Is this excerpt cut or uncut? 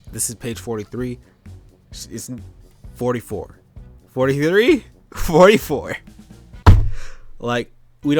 uncut